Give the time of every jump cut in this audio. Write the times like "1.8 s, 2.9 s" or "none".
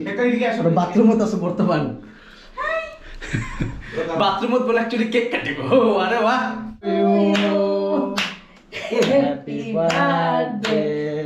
none